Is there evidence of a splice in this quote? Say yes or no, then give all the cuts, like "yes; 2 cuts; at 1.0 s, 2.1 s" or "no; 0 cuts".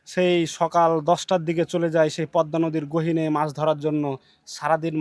no; 0 cuts